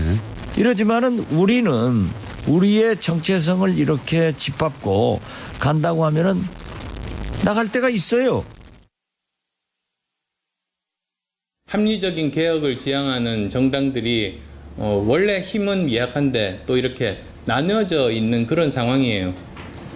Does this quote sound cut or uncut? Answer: uncut